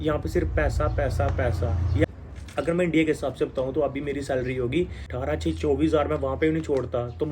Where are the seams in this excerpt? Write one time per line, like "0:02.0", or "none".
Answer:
0:02.1
0:05.1

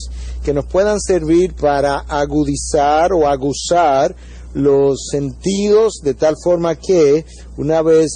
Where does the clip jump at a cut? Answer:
0:07.0

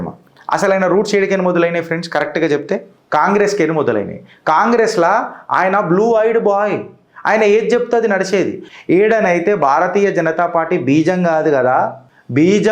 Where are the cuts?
0:02.9
0:08.7

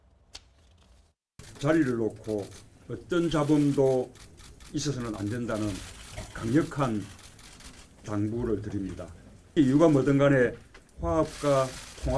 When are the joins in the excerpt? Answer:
none

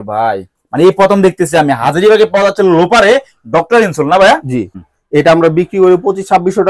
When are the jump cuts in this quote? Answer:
0:04.7

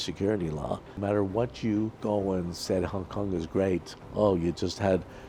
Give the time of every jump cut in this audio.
0:01.0
0:02.0
0:04.0

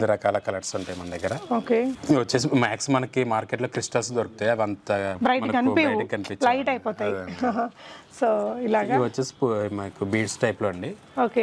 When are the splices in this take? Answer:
none

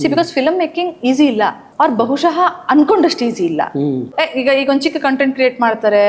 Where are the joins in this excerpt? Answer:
0:04.1

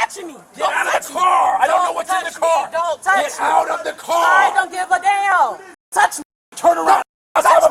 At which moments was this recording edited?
0:05.8

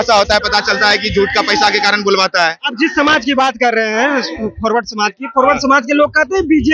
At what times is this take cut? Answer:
none

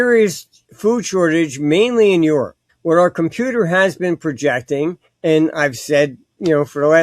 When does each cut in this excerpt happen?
0:05.1

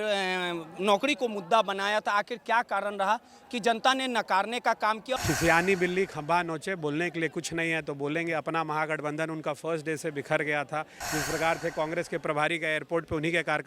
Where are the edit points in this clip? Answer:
0:05.2

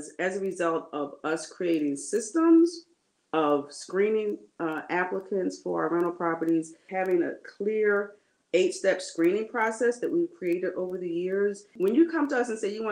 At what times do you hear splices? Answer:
0:06.8
0:11.7

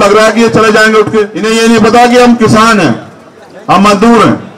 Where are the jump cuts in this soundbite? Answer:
0:01.4

